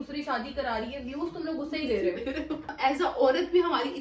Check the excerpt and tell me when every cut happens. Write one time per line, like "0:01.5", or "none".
0:02.7